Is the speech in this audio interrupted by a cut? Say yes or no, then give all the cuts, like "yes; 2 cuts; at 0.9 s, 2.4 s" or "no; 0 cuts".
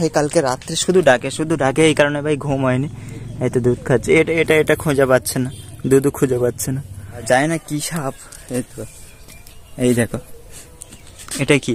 yes; 1 cut; at 7.2 s